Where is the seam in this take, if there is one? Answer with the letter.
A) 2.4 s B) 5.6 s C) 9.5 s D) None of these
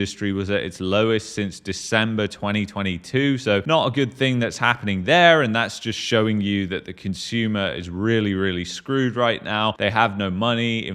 D